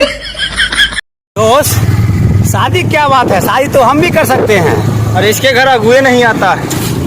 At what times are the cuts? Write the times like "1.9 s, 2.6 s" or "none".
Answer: 1.2 s